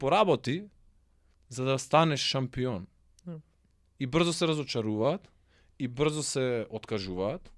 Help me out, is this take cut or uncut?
uncut